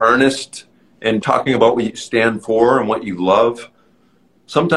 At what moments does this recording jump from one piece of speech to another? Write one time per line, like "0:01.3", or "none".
0:01.2